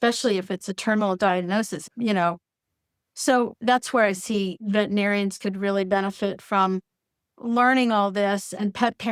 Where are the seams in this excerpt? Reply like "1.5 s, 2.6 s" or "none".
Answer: 1.9 s

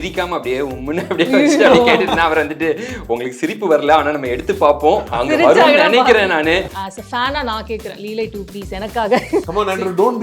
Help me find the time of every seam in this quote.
5.1 s, 6.7 s, 9.5 s

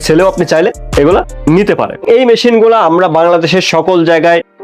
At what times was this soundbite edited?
2.0 s

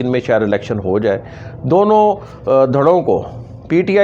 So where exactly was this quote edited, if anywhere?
none

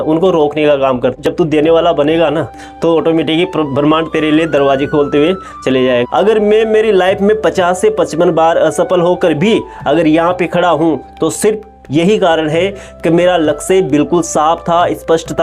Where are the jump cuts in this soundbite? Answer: 1.2 s, 6.0 s

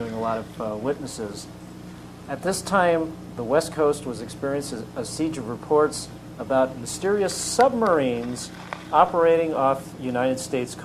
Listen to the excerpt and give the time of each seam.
none

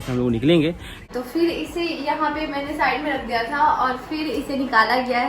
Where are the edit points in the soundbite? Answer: 1.1 s

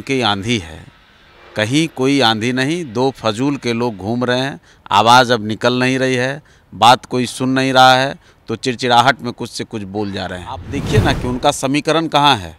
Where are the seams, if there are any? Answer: 10.7 s

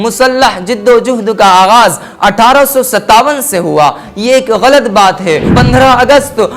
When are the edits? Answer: 5.5 s

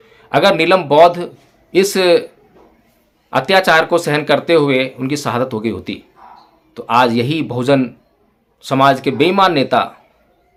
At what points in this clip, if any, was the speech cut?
none

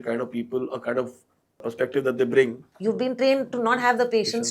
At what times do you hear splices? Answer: 1.6 s, 2.7 s

